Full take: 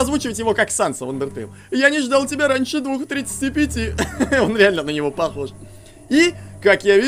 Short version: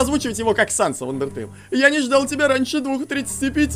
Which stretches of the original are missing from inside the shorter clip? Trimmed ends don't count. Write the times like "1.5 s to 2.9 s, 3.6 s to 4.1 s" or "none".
none